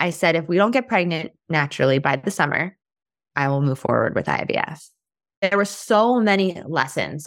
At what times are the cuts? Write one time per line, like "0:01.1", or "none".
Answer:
0:05.4